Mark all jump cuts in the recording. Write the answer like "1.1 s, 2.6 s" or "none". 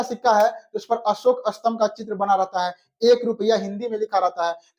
none